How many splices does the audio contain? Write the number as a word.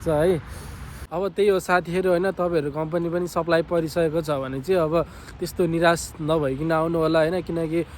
one